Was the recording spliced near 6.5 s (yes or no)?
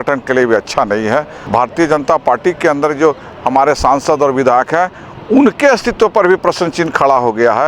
no